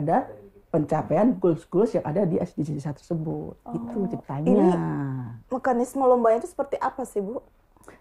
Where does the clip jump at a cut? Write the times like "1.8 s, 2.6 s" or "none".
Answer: none

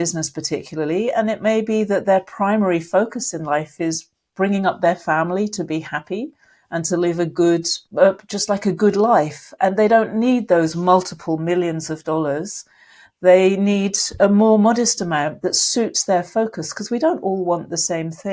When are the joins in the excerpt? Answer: 7.8 s

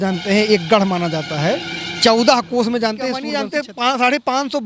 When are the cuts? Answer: 3.3 s

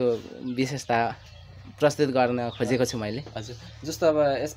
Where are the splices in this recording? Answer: none

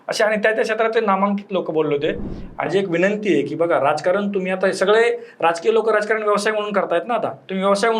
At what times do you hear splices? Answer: 2.7 s

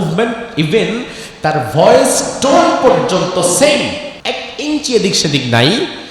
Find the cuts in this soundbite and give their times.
4.1 s

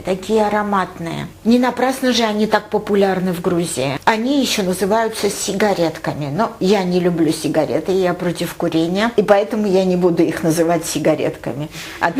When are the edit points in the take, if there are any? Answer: none

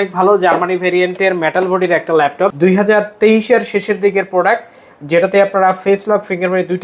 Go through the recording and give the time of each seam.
2.5 s

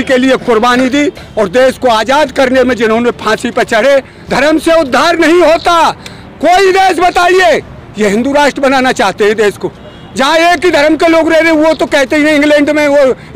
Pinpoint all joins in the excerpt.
4.2 s

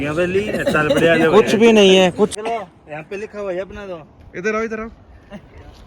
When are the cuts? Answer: 2.3 s

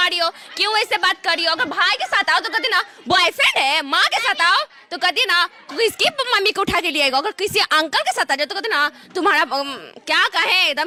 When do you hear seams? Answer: none

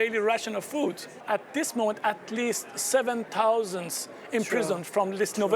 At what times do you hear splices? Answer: 1.2 s

